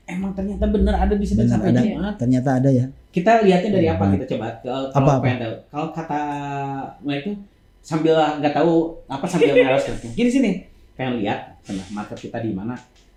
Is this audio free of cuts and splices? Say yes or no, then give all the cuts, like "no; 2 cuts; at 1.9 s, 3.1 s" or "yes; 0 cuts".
yes; 0 cuts